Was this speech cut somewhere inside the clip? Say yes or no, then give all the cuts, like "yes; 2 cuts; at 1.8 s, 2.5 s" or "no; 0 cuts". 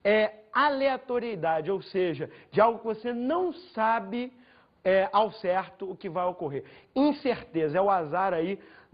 no; 0 cuts